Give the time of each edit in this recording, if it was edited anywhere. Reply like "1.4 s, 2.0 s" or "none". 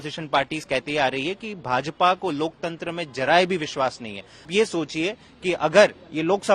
4.5 s